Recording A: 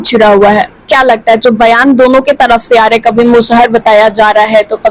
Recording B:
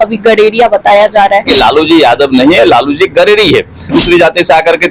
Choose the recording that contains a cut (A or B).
B